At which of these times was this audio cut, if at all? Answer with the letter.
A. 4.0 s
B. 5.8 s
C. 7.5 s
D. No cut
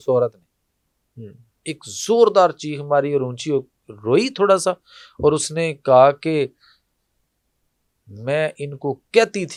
D